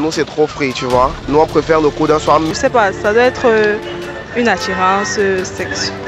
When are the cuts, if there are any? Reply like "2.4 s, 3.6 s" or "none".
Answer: 1.2 s, 2.5 s